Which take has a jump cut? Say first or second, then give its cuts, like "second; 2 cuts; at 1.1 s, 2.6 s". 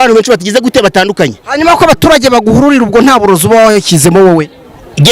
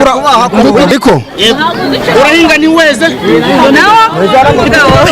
second; 1 cut; at 0.9 s